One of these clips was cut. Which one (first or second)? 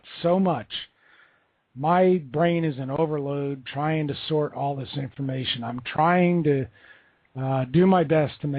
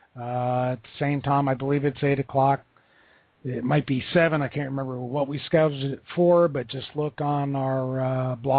second